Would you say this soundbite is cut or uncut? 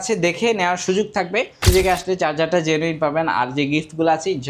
cut